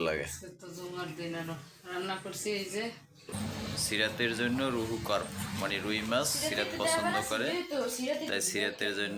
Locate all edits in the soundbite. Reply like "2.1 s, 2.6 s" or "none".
3.3 s